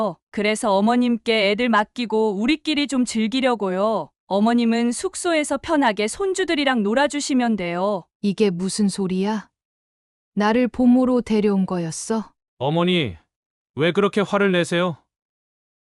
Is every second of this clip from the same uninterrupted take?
no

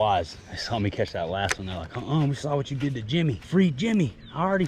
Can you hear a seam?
yes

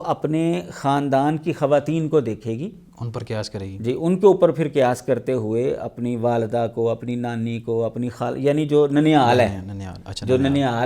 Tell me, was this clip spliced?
no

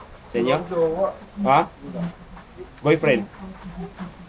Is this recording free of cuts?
yes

